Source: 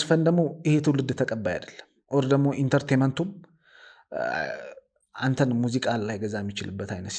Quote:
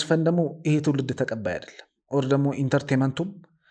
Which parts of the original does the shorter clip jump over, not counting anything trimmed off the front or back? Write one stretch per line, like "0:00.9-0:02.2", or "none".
none